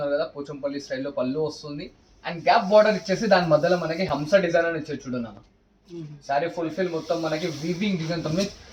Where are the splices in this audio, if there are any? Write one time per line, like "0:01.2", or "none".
none